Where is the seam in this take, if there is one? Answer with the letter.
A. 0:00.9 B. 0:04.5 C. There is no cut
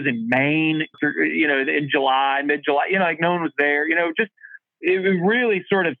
A